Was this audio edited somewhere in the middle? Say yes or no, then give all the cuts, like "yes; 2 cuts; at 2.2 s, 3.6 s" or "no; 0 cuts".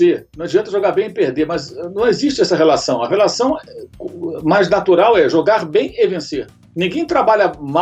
no; 0 cuts